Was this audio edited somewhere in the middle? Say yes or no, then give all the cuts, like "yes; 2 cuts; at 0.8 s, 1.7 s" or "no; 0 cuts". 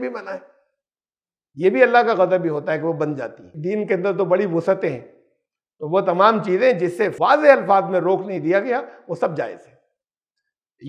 yes; 2 cuts; at 3.5 s, 7.1 s